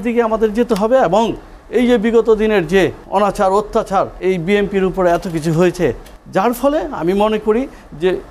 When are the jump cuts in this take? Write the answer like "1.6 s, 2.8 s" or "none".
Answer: 3.0 s, 4.1 s, 6.1 s